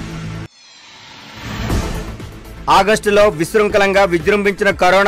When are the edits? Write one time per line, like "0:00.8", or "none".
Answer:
0:02.4